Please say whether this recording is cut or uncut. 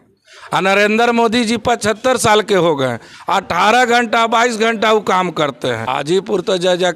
cut